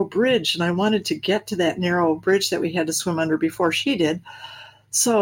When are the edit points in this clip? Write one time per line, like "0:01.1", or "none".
none